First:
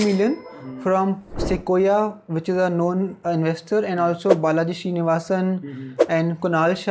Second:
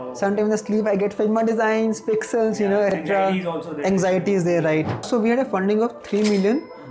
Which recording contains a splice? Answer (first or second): second